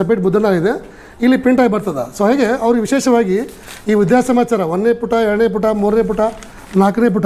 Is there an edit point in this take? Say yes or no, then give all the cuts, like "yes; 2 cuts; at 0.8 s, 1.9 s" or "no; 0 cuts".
no; 0 cuts